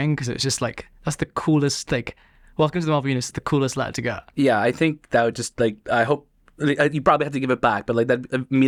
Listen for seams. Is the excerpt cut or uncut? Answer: uncut